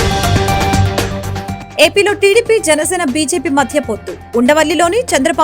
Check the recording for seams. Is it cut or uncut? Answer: cut